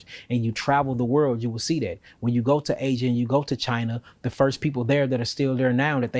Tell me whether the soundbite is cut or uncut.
uncut